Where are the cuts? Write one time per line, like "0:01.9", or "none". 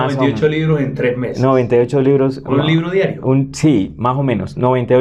none